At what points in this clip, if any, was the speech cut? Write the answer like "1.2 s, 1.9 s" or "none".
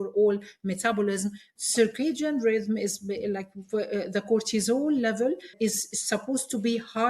1.5 s, 5.5 s